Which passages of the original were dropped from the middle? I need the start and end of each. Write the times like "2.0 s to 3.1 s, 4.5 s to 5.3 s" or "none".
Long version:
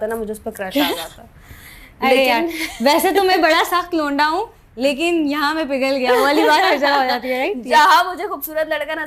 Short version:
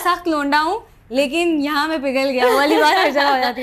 none